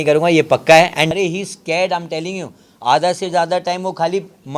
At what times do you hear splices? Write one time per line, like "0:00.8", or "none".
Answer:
0:01.1